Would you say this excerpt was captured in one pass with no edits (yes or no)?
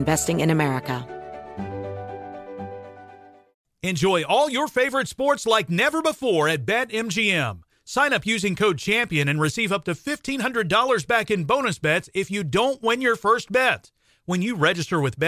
no